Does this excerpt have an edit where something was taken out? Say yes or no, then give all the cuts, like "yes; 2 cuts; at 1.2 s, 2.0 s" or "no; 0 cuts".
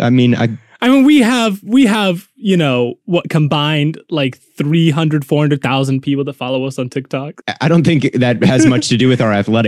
yes; 1 cut; at 7.4 s